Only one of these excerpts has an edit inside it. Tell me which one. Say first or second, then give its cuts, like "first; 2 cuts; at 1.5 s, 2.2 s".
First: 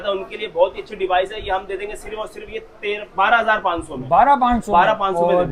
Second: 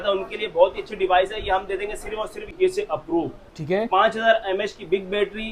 second; 1 cut; at 2.6 s